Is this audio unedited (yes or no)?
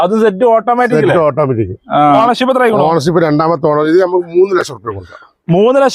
no